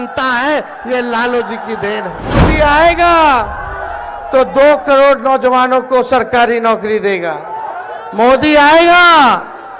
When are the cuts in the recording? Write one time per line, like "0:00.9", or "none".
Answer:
0:02.5